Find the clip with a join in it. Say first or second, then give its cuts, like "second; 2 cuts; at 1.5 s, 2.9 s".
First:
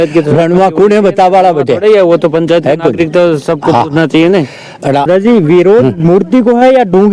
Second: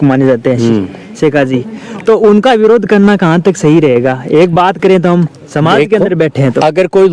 first; 1 cut; at 5.1 s